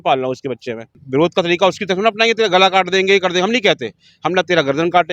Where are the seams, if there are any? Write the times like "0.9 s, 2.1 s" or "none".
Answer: 0.9 s